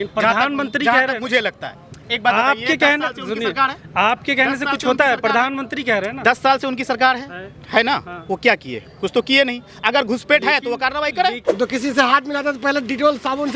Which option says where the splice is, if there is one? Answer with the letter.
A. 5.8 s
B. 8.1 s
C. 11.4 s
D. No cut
C